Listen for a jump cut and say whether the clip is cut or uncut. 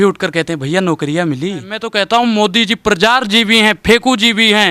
cut